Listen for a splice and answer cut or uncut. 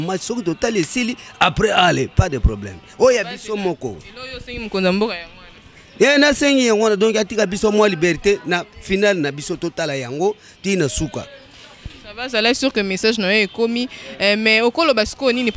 uncut